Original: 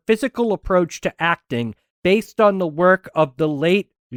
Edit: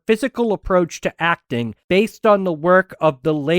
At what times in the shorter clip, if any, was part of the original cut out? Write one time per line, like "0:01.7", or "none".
0:01.8